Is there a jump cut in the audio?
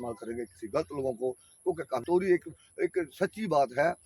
yes; 1 cut; at 2.0 s

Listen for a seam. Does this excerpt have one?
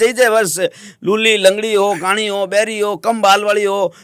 no; 0 cuts

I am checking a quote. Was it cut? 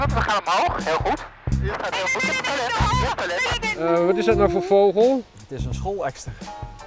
yes; 2 cuts; at 1.5 s, 3.8 s

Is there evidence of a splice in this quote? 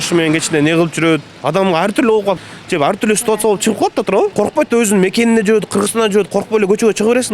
yes; 3 cuts; at 1.3 s, 2.4 s, 4.3 s

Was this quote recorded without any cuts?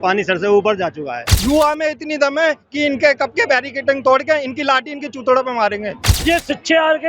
no; 2 cuts; at 1.3 s, 6.1 s

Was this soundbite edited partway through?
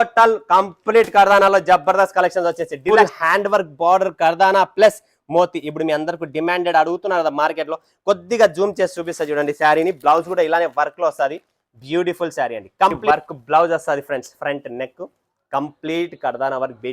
yes; 2 cuts; at 2.9 s, 13.0 s

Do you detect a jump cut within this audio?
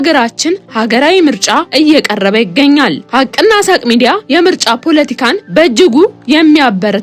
no; 0 cuts

